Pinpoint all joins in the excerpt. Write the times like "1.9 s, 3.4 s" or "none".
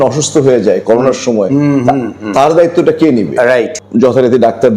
3.8 s